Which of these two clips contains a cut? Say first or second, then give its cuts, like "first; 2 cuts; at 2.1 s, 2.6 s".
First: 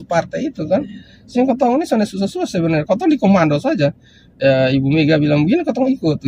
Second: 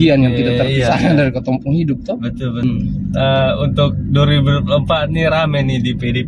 second; 1 cut; at 2.6 s